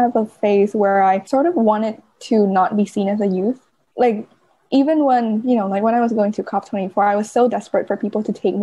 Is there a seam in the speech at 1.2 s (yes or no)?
yes